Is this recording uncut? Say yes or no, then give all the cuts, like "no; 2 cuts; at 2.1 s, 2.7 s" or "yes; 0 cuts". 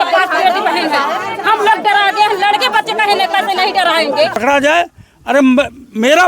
no; 1 cut; at 4.4 s